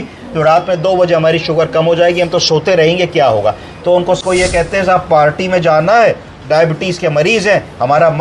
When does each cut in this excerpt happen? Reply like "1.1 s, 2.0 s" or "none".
4.2 s